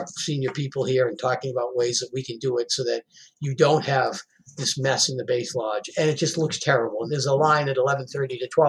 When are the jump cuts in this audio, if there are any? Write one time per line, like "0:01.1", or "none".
0:05.9
0:07.1